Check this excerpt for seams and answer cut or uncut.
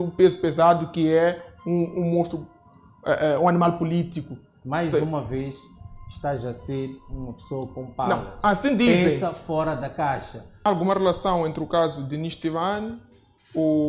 cut